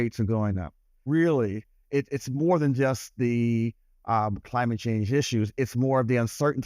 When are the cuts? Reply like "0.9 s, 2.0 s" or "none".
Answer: 1.0 s